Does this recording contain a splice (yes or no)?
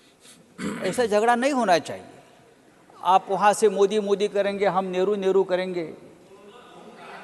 no